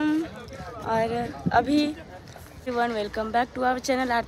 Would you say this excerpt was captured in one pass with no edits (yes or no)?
no